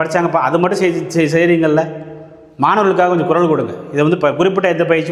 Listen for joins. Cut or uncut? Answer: uncut